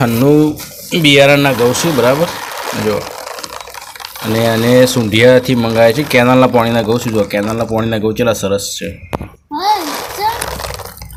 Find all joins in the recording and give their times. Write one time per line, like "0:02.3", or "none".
none